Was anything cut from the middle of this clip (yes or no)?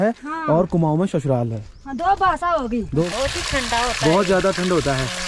yes